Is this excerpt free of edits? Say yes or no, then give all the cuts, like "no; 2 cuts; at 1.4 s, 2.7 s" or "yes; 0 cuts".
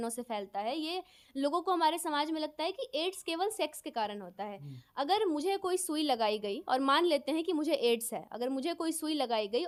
yes; 0 cuts